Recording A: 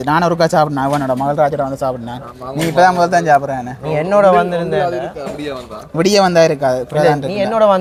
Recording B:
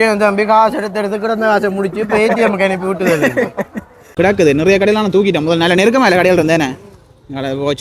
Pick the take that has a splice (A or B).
B